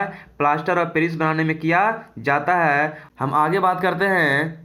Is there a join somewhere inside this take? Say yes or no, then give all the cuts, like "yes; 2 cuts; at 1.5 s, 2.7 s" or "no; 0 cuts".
yes; 1 cut; at 3.0 s